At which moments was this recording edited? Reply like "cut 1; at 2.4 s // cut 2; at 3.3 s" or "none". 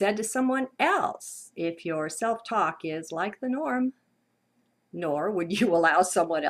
cut 1; at 2.0 s

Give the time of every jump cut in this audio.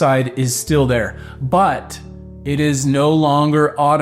none

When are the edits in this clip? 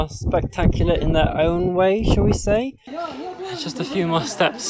cut 1; at 2.9 s

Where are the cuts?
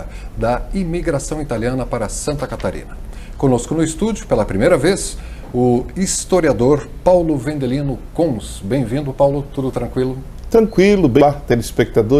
cut 1; at 11.2 s

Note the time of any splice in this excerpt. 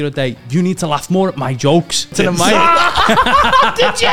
cut 1; at 2.1 s

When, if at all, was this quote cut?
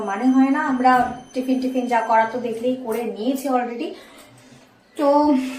none

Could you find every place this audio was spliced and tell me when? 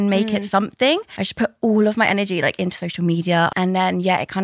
cut 1; at 1.2 s // cut 2; at 3.5 s

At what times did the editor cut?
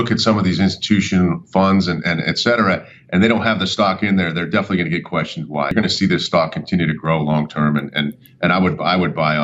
cut 1; at 5.7 s

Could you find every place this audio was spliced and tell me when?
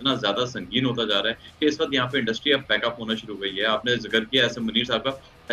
none

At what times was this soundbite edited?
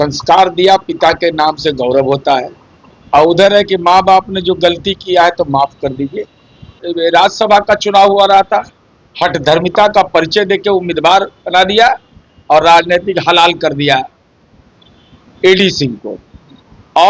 cut 1; at 6.8 s

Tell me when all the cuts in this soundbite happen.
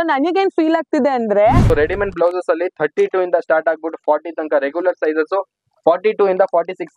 cut 1; at 1.6 s

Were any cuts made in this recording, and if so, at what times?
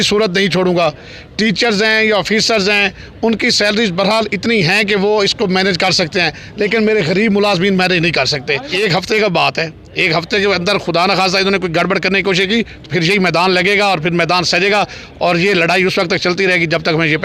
cut 1; at 8.6 s

